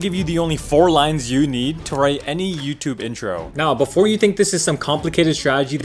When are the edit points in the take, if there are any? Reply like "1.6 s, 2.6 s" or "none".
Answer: 3.4 s